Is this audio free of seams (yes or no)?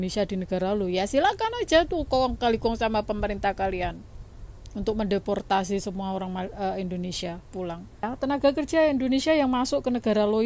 no